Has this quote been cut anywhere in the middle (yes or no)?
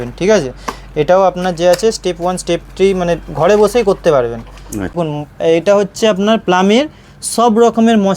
yes